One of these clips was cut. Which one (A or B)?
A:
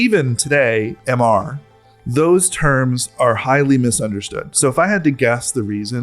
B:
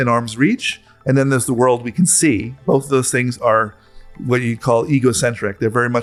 A